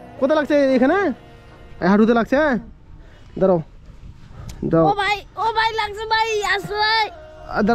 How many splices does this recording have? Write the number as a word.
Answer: zero